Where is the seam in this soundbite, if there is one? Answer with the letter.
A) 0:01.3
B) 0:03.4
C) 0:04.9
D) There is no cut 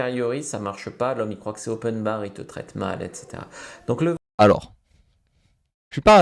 D